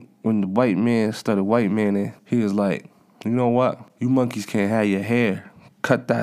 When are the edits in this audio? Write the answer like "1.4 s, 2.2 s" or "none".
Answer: 2.2 s, 3.9 s